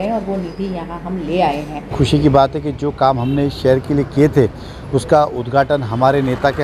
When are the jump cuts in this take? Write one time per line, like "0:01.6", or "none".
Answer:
0:01.9

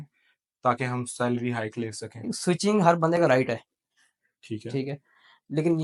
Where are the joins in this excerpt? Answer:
none

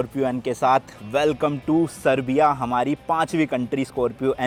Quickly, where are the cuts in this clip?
none

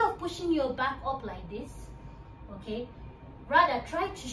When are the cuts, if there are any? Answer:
none

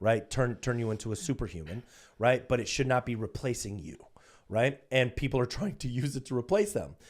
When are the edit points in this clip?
none

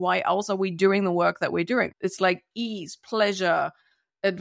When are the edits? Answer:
0:01.9

